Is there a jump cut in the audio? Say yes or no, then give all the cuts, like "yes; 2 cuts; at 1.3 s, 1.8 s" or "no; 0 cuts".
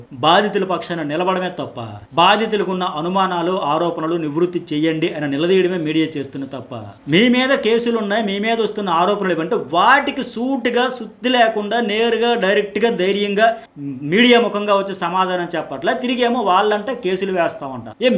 no; 0 cuts